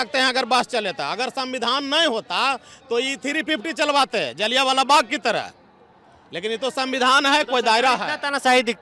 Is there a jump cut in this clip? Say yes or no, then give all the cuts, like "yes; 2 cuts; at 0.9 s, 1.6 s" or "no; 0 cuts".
no; 0 cuts